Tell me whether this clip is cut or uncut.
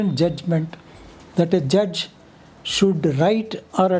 uncut